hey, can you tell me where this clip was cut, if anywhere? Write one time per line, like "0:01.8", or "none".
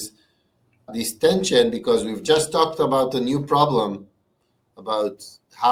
none